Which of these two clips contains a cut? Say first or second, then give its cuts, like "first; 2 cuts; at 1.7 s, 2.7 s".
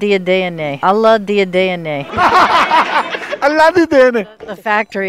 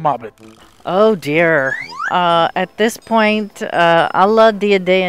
first; 1 cut; at 1.9 s